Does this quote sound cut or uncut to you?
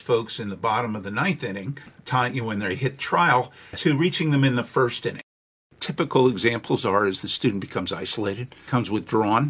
cut